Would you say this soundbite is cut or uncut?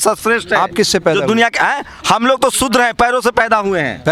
uncut